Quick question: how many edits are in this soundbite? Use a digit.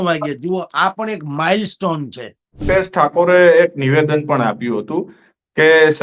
1